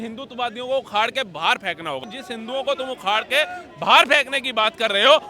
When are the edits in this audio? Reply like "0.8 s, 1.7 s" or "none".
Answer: 2.0 s